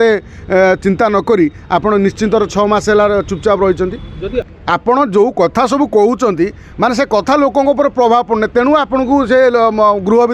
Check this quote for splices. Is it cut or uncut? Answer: cut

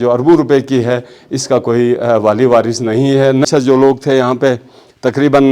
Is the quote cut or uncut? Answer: cut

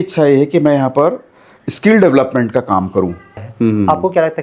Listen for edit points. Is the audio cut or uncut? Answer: cut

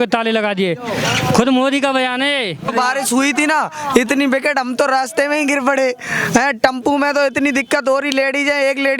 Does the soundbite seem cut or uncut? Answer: cut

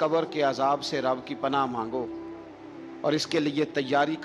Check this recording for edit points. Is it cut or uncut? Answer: uncut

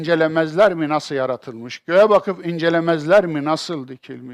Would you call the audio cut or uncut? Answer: cut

